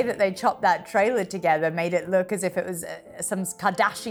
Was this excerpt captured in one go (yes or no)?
yes